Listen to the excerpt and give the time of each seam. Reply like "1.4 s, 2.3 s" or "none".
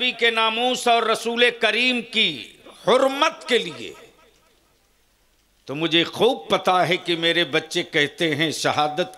none